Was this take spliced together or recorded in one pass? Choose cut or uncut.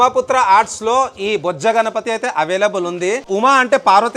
cut